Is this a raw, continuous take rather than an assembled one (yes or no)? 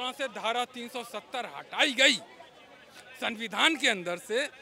yes